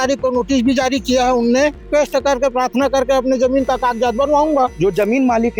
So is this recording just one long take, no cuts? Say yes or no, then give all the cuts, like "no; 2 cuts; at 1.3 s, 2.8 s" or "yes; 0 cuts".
no; 2 cuts; at 1.8 s, 4.7 s